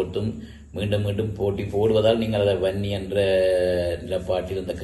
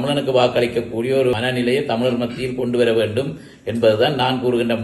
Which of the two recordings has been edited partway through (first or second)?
second